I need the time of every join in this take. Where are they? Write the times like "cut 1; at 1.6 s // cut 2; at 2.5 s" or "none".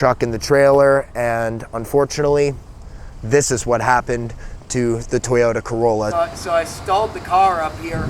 cut 1; at 6.2 s